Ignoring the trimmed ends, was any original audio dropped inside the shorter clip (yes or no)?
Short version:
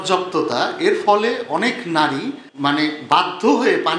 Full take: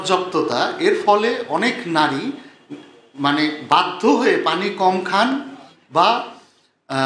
yes